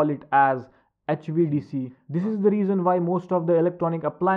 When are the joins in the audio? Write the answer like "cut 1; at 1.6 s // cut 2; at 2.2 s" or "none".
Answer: cut 1; at 2.0 s